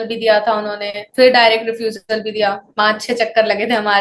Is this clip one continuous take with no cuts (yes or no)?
yes